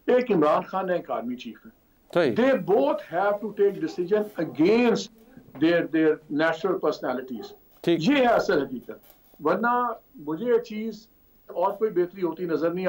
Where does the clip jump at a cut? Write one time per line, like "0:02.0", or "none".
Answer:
none